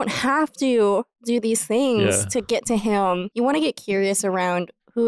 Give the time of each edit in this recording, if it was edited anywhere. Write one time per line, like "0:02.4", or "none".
0:03.3